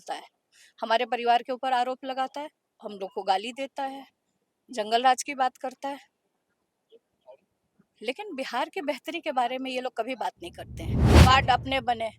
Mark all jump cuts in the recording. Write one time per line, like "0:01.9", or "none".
0:11.0

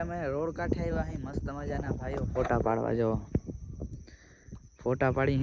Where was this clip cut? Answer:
none

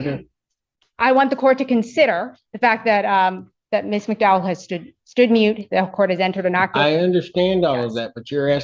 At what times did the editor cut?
none

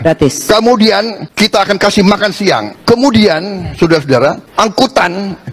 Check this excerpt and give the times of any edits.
0:01.2
0:02.7
0:04.4

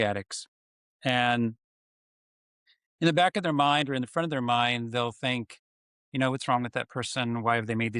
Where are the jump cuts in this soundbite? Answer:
none

